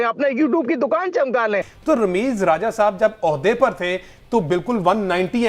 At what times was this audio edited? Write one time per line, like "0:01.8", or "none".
0:01.6

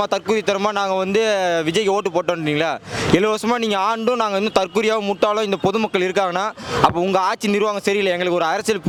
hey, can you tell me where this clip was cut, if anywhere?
none

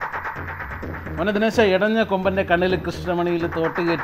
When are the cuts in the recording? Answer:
0:00.9

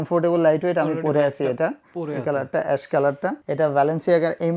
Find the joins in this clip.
none

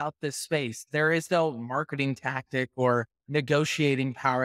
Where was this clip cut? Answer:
0:03.2

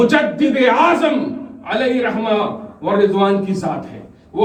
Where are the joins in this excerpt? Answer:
none

